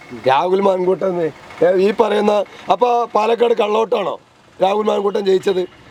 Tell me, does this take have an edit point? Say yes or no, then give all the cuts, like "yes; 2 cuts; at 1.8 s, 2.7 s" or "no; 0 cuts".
no; 0 cuts